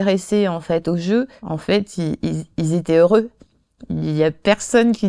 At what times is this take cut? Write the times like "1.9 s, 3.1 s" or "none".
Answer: none